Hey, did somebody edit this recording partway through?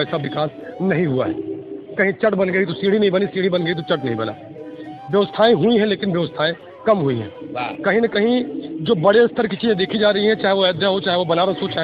no; 0 cuts

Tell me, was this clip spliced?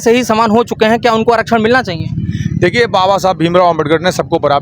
no; 0 cuts

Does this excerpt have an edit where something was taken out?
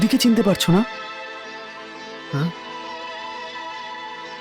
no; 0 cuts

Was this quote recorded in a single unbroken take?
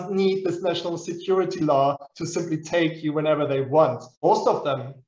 no; 1 cut; at 4.1 s

